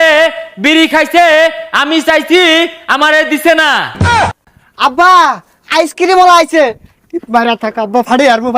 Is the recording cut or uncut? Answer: cut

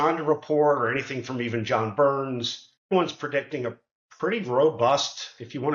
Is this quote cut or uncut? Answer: cut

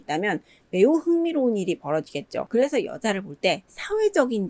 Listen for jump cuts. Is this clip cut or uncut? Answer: cut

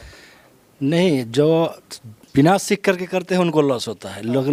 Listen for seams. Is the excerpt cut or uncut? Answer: uncut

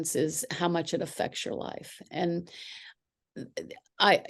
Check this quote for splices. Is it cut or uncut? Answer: uncut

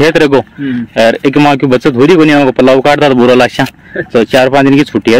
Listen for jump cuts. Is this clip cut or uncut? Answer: uncut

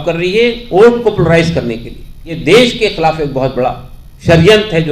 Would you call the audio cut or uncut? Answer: cut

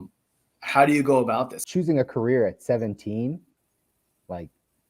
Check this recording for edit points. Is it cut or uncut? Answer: cut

